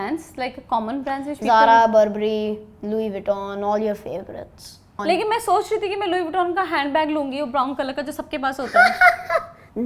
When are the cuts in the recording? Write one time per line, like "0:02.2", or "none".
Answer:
0:05.0